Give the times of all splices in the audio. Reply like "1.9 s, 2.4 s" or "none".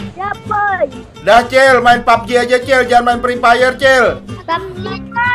1.1 s